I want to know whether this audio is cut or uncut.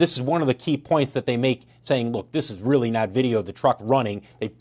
uncut